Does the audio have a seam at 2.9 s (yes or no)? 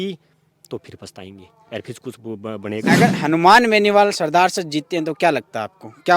yes